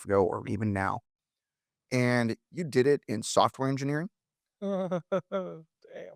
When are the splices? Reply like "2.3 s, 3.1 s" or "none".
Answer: none